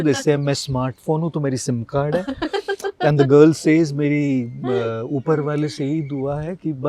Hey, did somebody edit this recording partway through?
no; 0 cuts

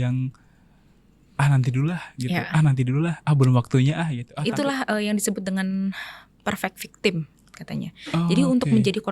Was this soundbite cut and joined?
yes; 1 cut; at 4.2 s

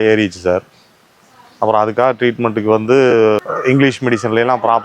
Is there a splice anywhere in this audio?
yes; 1 cut; at 3.4 s

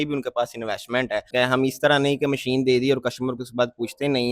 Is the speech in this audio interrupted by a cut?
yes; 1 cut; at 1.3 s

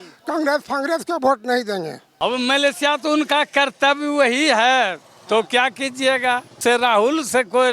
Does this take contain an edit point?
yes; 2 cuts; at 2.0 s, 6.6 s

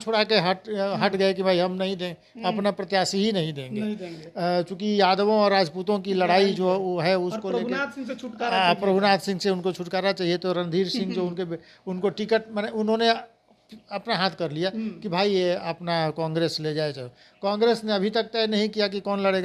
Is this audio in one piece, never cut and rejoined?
yes; 0 cuts

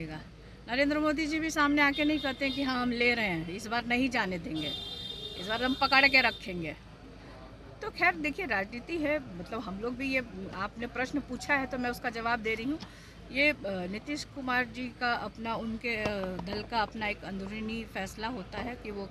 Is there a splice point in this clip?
no; 0 cuts

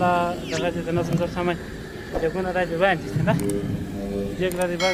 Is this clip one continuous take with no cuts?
yes; 0 cuts

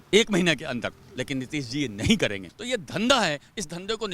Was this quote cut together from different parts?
yes; 1 cut; at 2.5 s

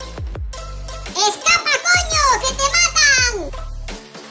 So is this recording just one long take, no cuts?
yes; 0 cuts

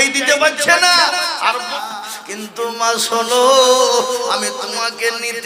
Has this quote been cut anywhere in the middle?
yes; 1 cut; at 1.8 s

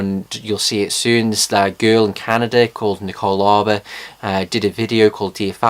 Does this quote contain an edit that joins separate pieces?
yes; 1 cut; at 1.5 s

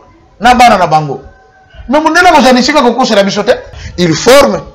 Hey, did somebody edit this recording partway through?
yes; 1 cut; at 3.8 s

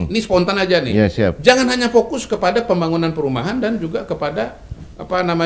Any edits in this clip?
no; 0 cuts

